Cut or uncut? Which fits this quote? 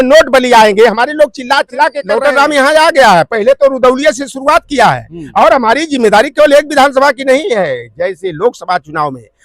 cut